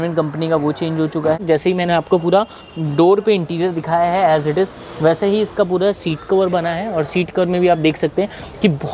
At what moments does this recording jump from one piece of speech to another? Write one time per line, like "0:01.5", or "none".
0:01.4